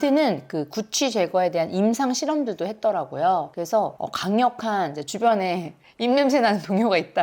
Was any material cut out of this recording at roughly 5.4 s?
no; 0 cuts

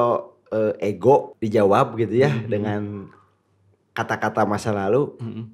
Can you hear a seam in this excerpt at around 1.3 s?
yes; 1 cut; at 1.3 s

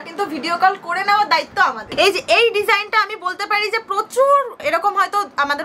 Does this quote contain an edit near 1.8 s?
yes; 1 cut; at 1.8 s

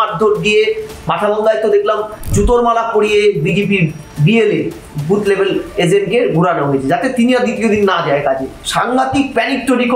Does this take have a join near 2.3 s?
yes; 2 cuts; at 2.3 s, 8.6 s

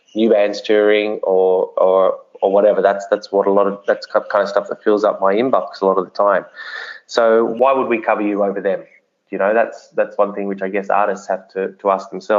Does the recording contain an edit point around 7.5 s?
yes; 1 cut; at 7.5 s

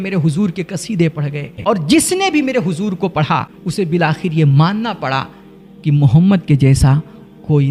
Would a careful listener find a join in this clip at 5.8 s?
no; 2 cuts; at 1.5 s, 3.6 s

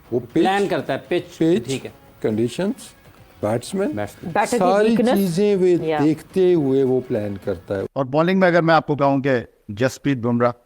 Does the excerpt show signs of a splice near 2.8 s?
no; 1 cut; at 7.9 s

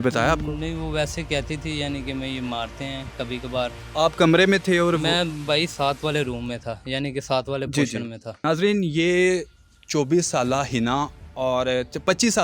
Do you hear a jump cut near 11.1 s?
no; 2 cuts; at 3.8 s, 8.4 s

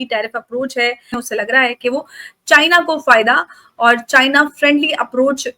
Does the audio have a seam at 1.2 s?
yes; 1 cut; at 1.2 s

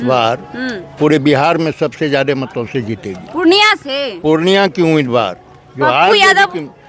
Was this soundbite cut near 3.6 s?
no; 0 cuts

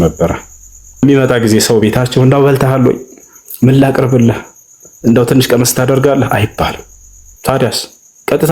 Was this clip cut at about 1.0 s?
yes; 1 cut; at 1.0 s

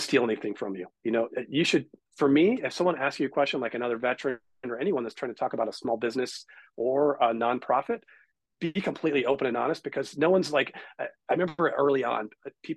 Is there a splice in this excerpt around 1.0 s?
no; 0 cuts

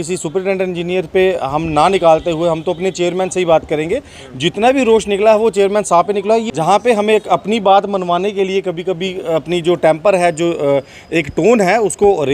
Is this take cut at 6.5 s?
yes; 1 cut; at 6.5 s

